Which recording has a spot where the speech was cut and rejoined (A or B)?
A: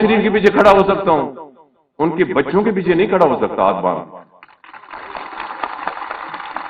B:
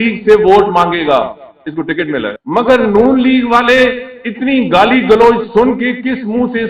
B